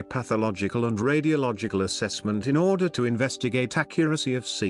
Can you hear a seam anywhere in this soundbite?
yes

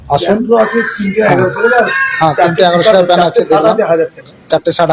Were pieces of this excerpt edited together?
no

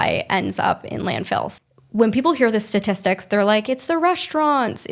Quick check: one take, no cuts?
no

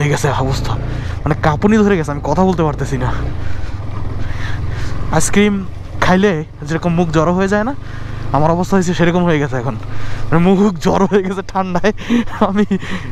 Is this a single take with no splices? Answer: yes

